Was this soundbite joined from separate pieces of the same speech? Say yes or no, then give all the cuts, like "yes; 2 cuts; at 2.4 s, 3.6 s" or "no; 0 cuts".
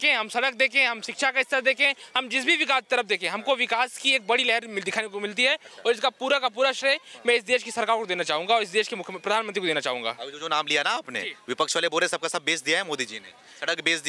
no; 0 cuts